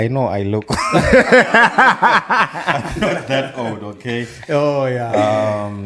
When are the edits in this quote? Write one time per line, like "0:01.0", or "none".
none